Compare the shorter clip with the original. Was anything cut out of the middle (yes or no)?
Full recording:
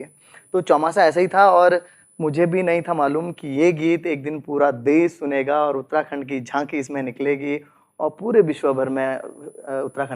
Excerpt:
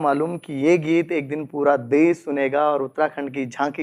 no